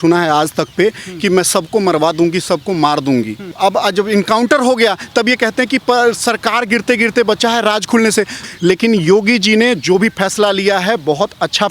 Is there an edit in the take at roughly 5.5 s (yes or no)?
no